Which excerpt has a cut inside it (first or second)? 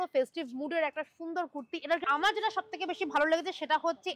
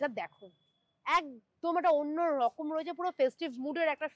first